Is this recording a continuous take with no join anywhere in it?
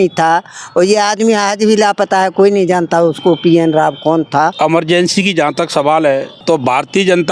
no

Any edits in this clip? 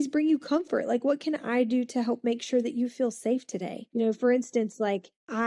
no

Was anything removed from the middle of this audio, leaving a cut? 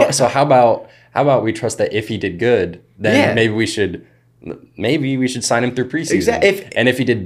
no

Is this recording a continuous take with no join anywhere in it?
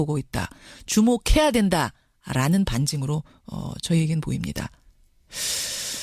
no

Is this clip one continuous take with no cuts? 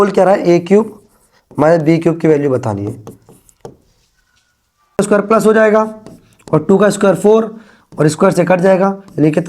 no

